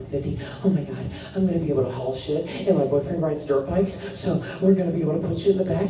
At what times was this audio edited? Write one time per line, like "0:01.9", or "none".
none